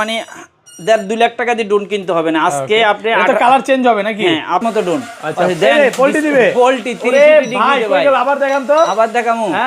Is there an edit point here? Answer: yes; 1 cut; at 4.7 s

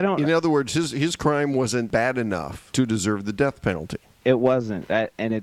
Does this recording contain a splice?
yes; 2 cuts; at 2.0 s, 4.2 s

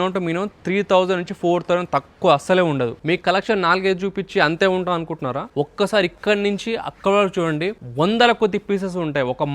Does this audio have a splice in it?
yes; 3 cuts; at 3.0 s, 5.5 s, 7.8 s

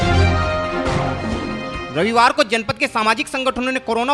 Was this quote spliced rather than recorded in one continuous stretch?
no; 0 cuts

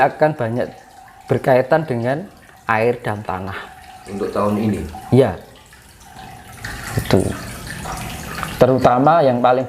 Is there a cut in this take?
yes; 1 cut; at 6.6 s

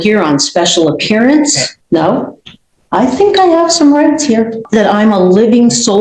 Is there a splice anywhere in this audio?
yes; 2 cuts; at 1.7 s, 4.6 s

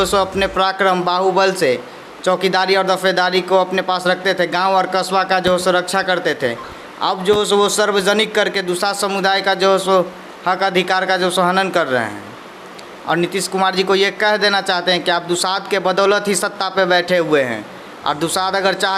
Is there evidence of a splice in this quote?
no; 0 cuts

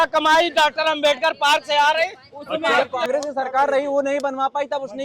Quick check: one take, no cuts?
no; 1 cut; at 2.8 s

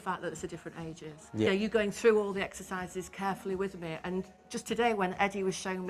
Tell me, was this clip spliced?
yes; 1 cut; at 1.5 s

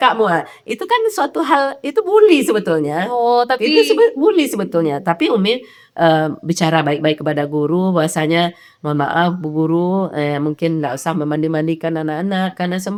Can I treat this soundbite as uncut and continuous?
yes; 0 cuts

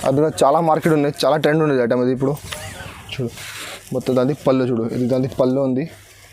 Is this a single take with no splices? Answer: yes; 0 cuts

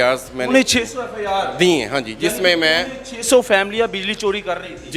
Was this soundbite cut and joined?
no; 0 cuts

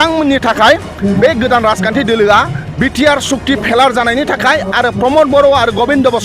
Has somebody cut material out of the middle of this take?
no; 0 cuts

